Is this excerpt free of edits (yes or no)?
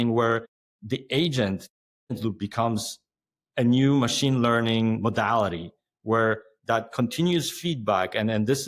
yes